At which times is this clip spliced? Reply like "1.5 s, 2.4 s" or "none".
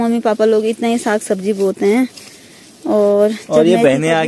none